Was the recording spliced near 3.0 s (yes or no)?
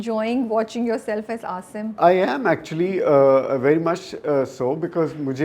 no